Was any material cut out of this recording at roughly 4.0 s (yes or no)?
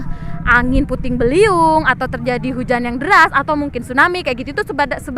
no